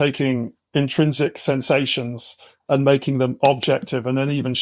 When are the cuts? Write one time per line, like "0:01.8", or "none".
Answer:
none